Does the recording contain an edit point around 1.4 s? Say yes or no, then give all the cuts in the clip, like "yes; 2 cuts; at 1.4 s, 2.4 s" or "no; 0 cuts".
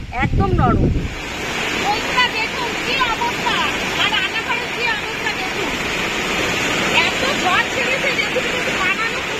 yes; 1 cut; at 1.4 s